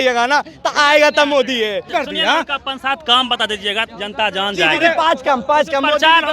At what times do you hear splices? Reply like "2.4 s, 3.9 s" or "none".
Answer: none